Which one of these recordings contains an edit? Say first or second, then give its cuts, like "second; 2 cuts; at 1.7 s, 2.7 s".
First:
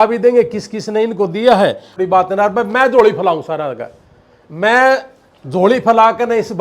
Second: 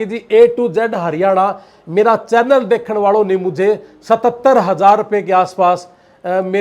first; 1 cut; at 1.9 s